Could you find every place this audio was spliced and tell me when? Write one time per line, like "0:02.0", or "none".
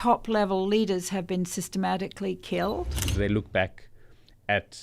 0:03.1